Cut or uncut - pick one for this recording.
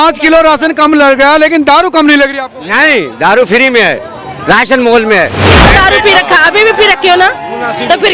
cut